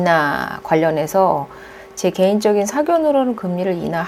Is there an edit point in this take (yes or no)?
no